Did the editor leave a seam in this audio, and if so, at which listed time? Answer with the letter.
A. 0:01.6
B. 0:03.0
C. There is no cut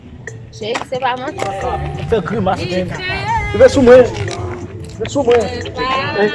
A